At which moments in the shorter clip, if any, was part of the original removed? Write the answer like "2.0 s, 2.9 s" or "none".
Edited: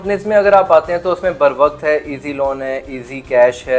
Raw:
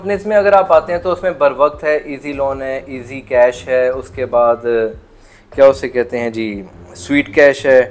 none